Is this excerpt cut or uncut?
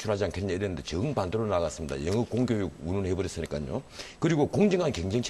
uncut